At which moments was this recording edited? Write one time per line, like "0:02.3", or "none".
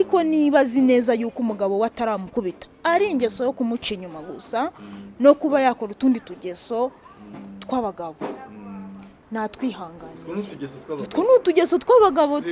none